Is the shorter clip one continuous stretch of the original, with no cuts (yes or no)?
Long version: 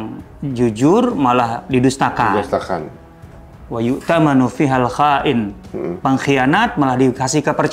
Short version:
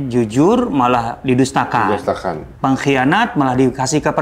no